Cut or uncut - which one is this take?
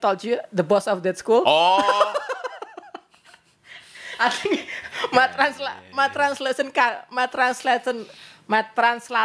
uncut